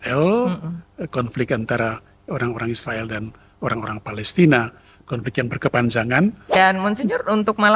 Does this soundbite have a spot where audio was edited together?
yes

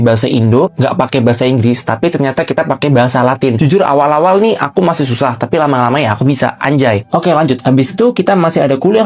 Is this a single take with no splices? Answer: yes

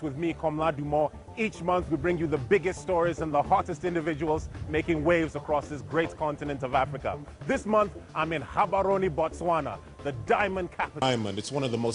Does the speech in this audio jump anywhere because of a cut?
no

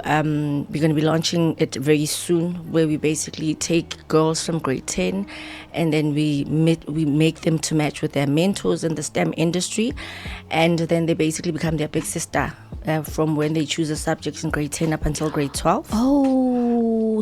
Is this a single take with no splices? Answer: yes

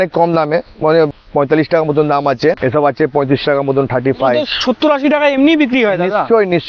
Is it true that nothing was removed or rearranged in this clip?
no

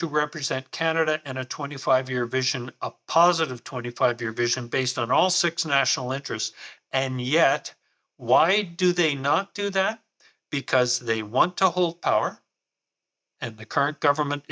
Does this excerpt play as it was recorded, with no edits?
yes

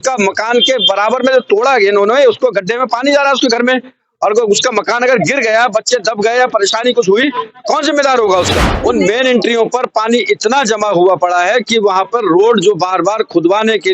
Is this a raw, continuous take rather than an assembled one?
no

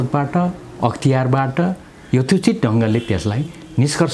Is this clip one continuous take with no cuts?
yes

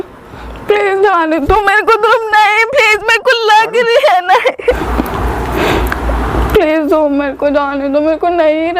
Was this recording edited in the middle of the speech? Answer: yes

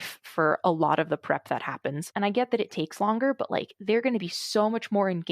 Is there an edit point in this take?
yes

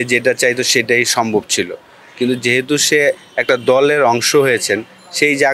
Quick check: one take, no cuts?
yes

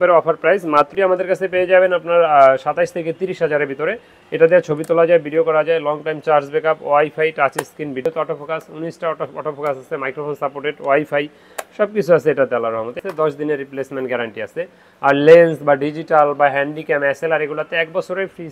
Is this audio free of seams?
no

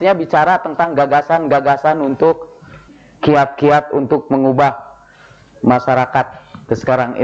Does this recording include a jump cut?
yes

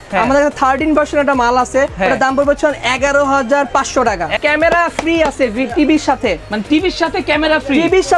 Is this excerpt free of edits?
no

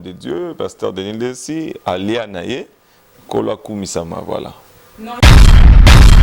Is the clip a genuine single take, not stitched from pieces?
no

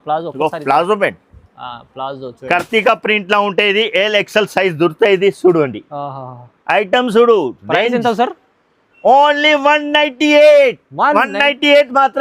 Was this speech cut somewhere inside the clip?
yes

